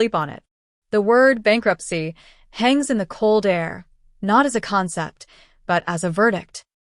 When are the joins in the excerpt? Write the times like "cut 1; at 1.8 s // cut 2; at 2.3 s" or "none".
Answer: none